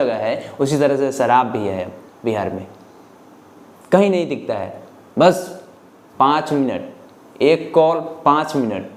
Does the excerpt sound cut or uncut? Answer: uncut